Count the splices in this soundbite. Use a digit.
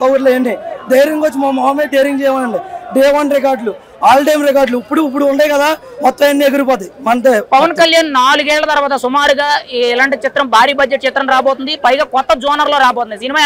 0